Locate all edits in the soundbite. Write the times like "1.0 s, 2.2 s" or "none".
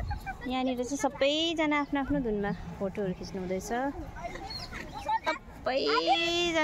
5.3 s